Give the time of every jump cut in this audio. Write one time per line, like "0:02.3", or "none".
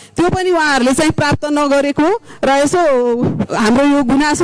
none